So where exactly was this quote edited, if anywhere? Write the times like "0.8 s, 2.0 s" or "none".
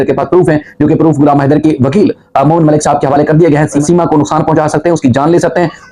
3.8 s